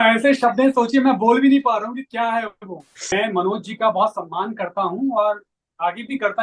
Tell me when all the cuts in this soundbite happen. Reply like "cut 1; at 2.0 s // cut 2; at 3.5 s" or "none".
cut 1; at 3.0 s